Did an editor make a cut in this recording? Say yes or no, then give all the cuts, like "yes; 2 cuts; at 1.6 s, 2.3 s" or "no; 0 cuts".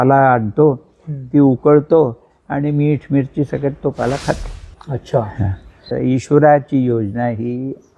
yes; 1 cut; at 5.8 s